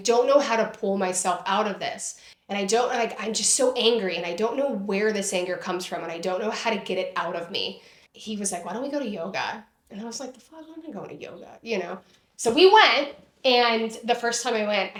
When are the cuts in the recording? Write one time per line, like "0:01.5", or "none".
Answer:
none